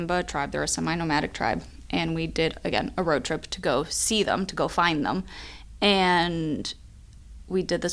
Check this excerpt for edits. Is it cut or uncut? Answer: uncut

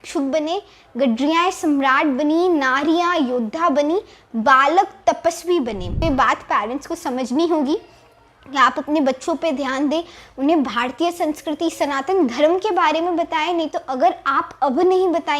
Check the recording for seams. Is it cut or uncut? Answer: cut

